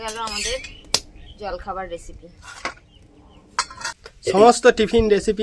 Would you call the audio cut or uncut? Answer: cut